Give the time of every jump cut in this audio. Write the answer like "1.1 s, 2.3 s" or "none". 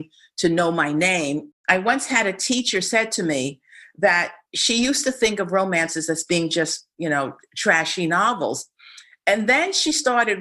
1.5 s